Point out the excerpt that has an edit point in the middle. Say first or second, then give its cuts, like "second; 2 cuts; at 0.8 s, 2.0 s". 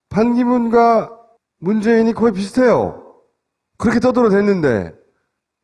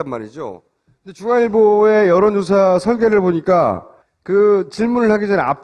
second; 1 cut; at 4.7 s